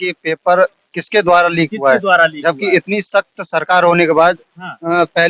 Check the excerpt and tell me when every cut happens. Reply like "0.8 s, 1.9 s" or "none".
none